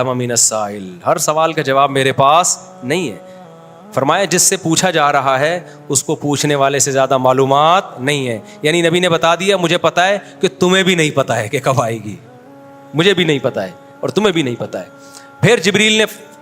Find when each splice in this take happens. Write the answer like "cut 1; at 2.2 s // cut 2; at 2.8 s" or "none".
none